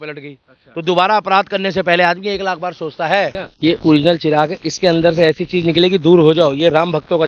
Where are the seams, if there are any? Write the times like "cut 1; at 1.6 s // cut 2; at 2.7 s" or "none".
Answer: cut 1; at 3.4 s